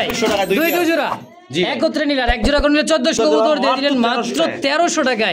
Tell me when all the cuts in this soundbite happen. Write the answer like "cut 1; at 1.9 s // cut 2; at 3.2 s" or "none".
cut 1; at 3.2 s